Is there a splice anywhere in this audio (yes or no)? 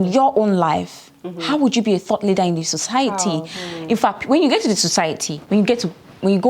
no